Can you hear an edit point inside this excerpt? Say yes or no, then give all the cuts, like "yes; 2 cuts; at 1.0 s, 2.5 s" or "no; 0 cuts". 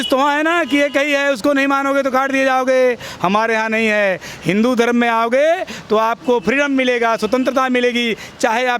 no; 0 cuts